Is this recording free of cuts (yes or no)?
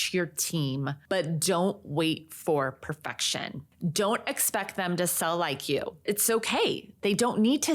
no